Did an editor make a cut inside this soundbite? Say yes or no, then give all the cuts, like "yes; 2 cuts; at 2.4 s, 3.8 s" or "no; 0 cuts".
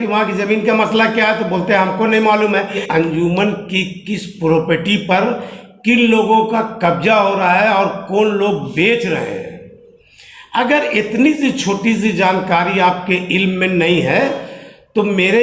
yes; 1 cut; at 2.8 s